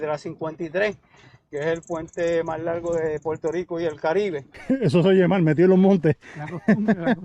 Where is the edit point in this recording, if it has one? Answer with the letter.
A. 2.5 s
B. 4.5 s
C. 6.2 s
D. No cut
B